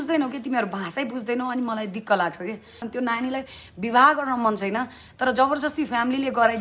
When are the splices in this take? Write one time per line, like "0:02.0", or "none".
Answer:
0:02.9

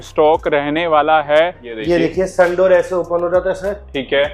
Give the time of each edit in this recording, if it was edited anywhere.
0:01.7

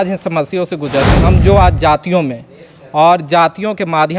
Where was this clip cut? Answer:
0:01.2

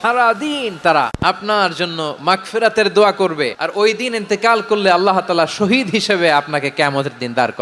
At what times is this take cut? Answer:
0:01.1
0:03.6

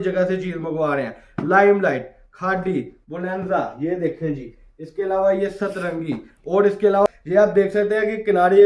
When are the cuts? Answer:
0:07.1

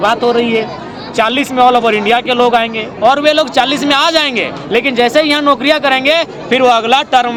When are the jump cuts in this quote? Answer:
none

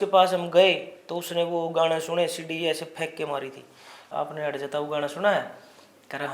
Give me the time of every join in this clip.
0:04.1

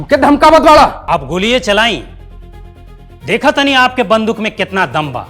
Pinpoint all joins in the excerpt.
0:01.0

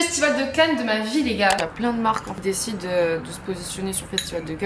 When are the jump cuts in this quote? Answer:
0:01.6

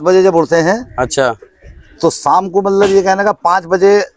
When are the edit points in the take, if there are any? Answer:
none

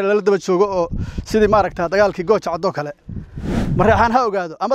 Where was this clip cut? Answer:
0:03.6

